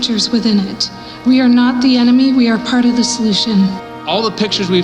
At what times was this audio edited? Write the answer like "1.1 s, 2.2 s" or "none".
3.9 s